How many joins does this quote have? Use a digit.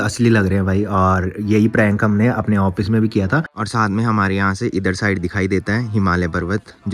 1